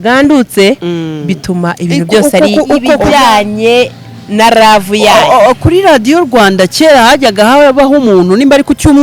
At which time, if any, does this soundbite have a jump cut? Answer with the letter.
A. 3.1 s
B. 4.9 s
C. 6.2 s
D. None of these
A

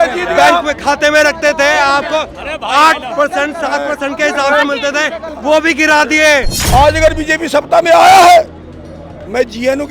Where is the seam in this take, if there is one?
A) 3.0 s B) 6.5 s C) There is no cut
B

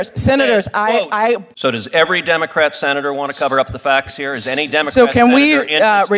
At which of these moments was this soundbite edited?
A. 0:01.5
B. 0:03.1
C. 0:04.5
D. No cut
A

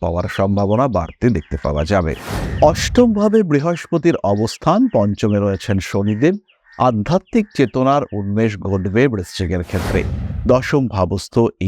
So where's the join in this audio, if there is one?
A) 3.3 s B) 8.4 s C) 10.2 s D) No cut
C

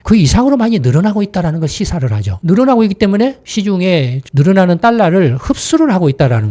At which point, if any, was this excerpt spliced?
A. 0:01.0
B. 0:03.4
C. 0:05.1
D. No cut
B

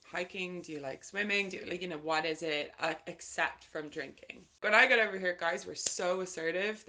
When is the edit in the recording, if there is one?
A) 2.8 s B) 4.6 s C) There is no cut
B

